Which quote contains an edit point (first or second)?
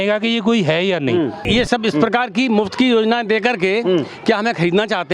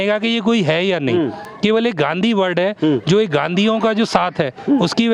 first